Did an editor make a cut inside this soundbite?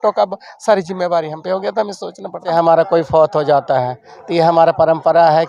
yes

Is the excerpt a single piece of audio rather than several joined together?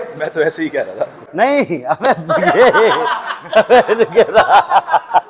no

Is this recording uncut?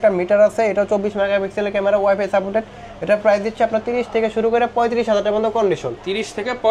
yes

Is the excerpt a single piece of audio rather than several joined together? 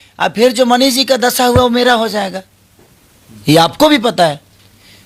yes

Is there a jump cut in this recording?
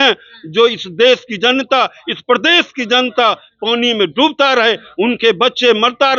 no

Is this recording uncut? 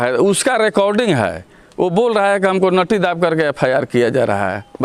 yes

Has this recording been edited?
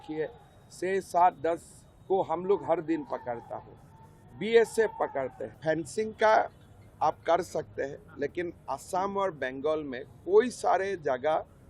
yes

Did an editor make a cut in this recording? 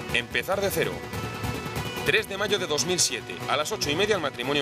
yes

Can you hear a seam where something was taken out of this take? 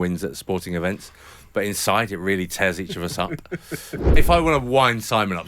yes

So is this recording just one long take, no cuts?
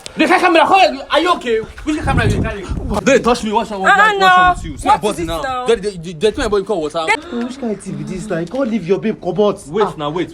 no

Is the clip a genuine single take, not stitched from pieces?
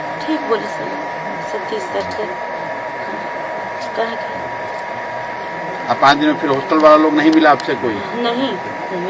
no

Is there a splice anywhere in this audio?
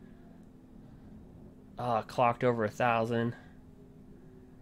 yes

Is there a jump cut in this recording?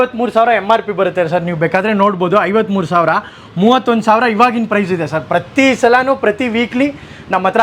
no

